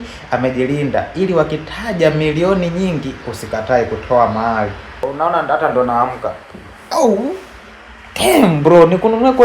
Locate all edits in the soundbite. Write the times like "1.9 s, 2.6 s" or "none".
5.0 s